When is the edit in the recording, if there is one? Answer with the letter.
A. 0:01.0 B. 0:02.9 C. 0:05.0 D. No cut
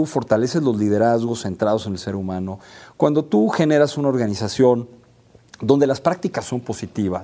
D